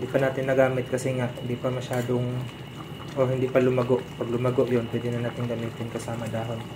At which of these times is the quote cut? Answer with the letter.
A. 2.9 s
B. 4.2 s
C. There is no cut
C